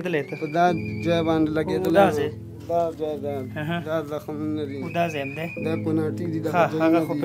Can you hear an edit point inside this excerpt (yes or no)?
no